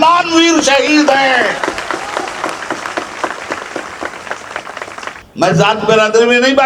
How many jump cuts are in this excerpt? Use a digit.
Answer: 1